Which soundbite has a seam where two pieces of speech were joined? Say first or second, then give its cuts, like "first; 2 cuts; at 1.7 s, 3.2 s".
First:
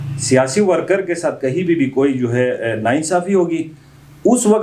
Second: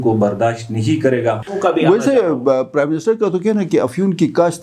second; 1 cut; at 1.5 s